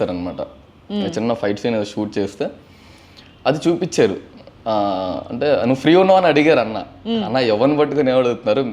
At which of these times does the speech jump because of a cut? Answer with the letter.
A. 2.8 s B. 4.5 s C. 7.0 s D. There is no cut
D